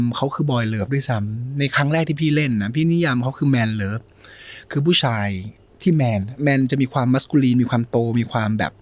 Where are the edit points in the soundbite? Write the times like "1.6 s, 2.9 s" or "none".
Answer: none